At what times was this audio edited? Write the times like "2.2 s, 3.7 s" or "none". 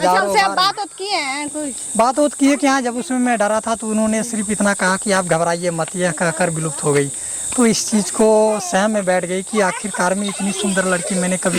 none